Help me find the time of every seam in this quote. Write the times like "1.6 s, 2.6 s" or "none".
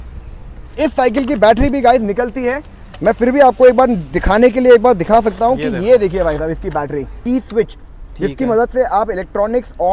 7.2 s